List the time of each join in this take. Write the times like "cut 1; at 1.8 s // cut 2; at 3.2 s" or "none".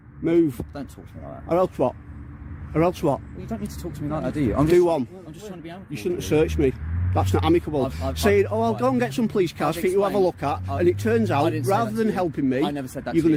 none